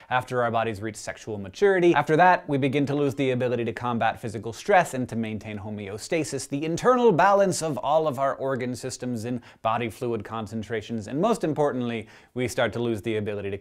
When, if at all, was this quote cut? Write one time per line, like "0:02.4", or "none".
0:08.3